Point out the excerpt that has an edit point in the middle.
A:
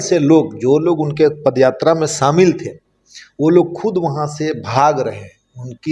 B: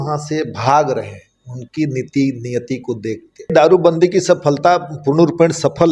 B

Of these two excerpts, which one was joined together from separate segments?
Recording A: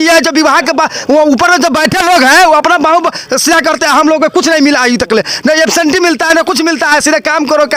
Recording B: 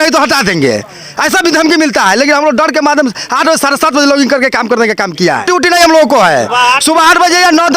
B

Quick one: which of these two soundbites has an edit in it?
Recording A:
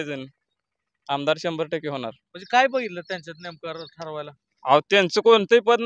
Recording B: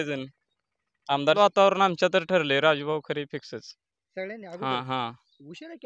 B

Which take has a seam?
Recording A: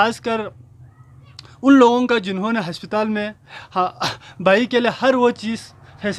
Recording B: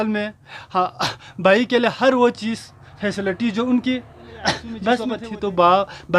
B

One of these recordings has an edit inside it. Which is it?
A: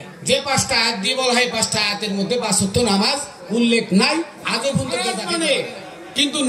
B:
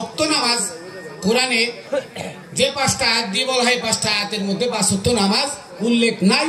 A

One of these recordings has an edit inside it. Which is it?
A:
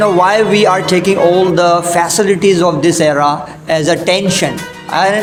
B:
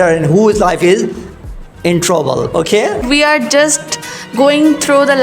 B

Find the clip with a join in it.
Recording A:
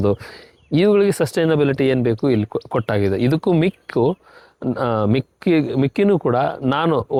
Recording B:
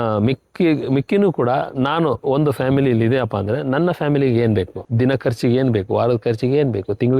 B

